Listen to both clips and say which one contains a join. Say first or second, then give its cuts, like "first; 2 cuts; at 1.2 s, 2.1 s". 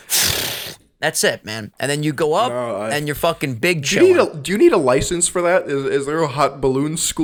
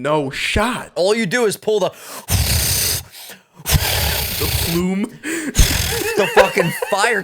second; 1 cut; at 0.9 s